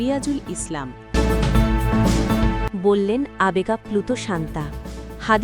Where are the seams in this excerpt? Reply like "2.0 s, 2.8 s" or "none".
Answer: 1.1 s, 2.7 s